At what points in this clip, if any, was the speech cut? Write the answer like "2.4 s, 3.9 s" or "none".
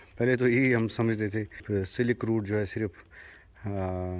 1.6 s